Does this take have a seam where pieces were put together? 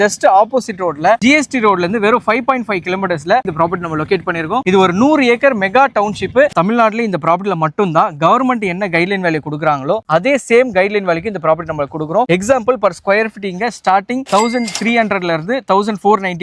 yes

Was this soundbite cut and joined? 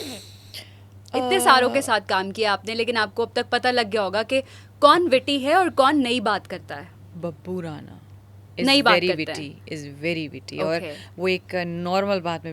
no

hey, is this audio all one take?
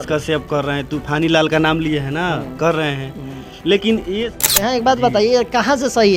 no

